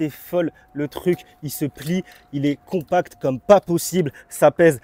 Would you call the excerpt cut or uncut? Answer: uncut